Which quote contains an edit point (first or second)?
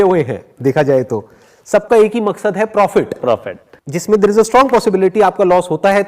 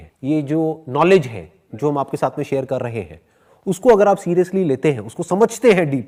first